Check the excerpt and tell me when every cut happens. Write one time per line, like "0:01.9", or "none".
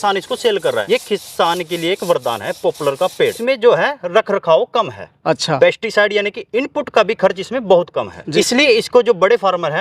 0:00.8
0:03.2
0:08.2

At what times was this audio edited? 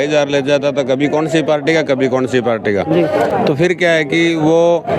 none

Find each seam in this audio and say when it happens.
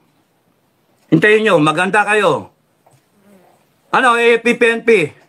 none

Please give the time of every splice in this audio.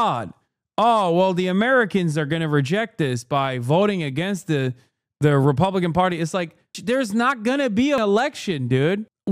0:06.8
0:08.0

